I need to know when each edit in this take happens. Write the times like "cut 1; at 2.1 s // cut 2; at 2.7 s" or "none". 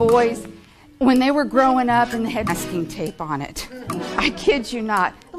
cut 1; at 2.6 s